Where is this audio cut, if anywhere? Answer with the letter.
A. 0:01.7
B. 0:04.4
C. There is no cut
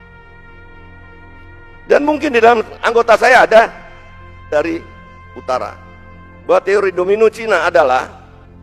B